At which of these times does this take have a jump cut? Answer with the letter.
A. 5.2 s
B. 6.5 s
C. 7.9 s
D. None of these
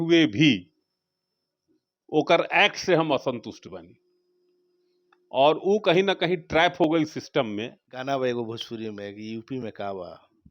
C